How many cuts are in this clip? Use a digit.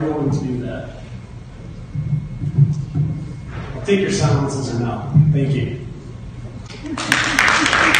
0